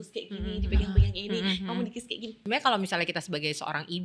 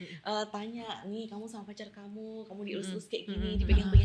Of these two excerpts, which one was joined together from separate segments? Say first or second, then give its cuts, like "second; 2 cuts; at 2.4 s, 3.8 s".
first; 1 cut; at 2.4 s